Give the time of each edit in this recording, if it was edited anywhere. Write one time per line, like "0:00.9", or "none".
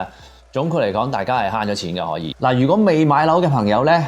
0:02.3